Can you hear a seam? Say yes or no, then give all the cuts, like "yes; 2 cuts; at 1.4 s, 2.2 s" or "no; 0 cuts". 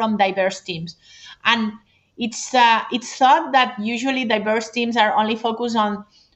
no; 0 cuts